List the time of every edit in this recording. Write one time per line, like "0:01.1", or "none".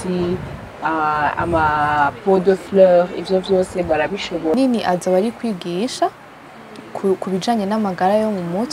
0:04.5